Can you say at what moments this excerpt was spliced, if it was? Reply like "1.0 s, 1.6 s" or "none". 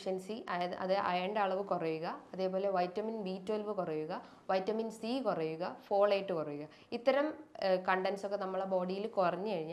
none